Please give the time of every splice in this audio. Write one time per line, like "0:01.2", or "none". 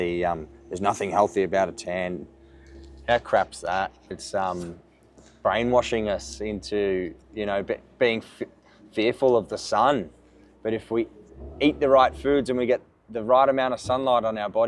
0:04.0